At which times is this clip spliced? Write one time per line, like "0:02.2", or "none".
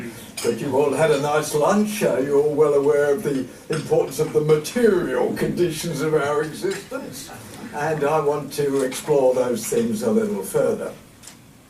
0:08.4